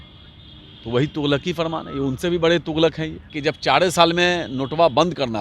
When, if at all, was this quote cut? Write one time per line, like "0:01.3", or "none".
0:03.3